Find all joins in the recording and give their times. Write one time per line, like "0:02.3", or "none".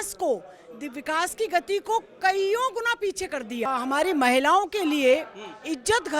0:03.7